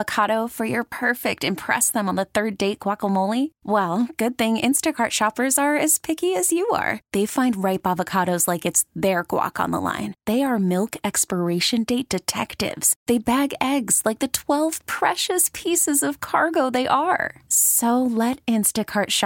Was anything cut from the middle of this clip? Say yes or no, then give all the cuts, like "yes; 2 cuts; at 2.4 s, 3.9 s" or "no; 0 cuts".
no; 0 cuts